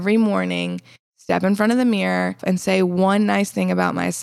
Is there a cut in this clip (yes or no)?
yes